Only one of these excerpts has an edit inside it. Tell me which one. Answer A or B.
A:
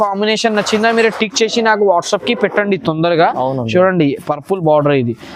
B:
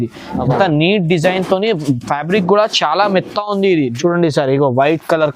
B